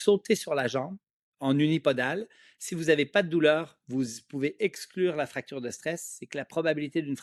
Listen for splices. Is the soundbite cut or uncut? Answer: uncut